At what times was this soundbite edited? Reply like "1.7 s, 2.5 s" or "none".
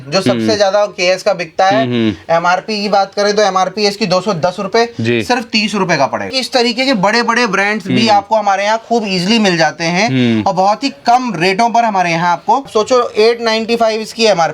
6.3 s, 12.7 s